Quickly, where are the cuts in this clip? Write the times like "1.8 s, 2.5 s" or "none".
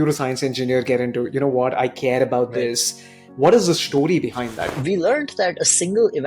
4.6 s